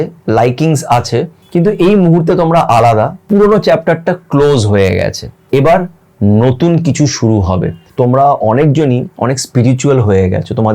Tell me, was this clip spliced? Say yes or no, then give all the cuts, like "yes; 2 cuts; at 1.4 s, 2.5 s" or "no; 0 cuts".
yes; 4 cuts; at 1.4 s, 3.2 s, 5.3 s, 7.8 s